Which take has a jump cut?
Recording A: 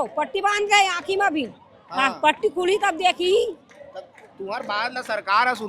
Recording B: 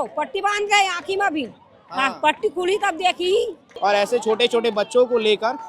B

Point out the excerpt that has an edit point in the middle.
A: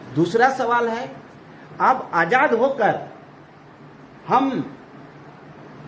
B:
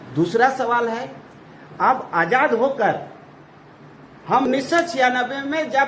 B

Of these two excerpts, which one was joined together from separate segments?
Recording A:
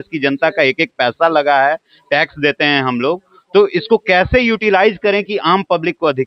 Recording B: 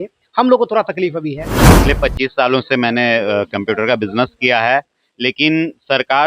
B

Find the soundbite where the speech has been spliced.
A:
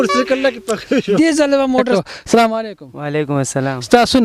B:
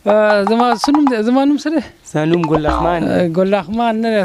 A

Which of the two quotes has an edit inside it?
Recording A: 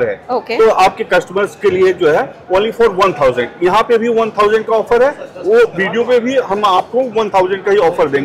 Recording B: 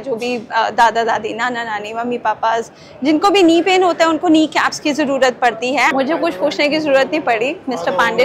B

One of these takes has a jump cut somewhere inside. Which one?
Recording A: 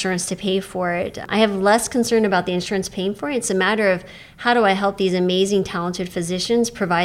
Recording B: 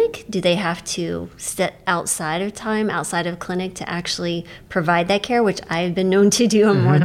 A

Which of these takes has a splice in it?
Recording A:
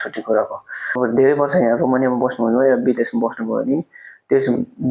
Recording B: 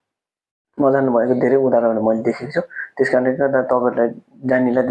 A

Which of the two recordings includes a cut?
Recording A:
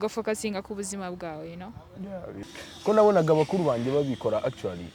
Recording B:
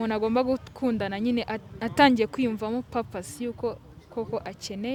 A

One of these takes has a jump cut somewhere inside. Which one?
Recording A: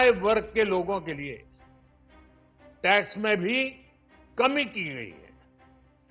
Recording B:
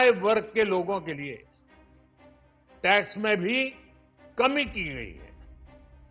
B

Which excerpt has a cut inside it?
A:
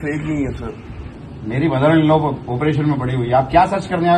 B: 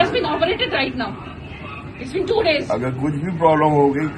B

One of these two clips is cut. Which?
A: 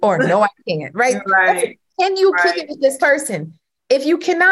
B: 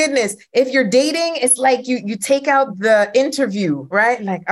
B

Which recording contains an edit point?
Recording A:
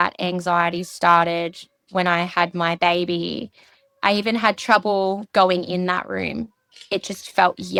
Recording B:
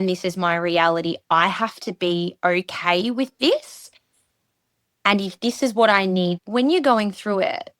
B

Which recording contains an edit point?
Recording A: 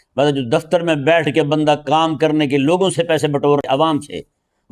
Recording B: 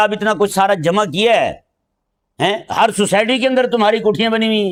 A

